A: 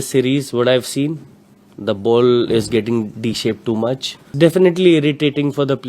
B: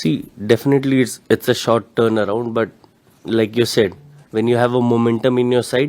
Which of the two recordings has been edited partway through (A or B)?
A